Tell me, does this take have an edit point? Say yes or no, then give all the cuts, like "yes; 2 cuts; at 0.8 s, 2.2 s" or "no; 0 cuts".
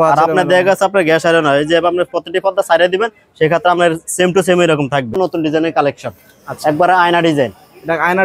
yes; 1 cut; at 5.5 s